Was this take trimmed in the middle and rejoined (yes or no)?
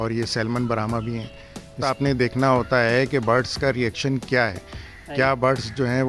yes